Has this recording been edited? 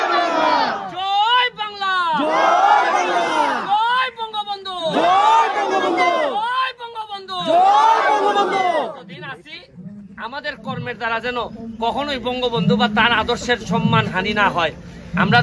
no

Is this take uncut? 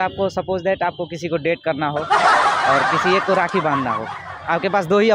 yes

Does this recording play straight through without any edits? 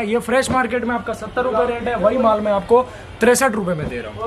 yes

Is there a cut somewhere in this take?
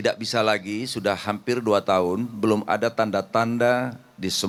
no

